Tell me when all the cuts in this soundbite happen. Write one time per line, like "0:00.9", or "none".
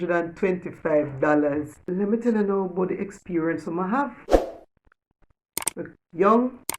0:01.8